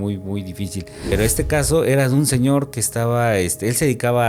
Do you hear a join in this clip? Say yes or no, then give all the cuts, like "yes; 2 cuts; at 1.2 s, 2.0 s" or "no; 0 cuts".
yes; 1 cut; at 1.1 s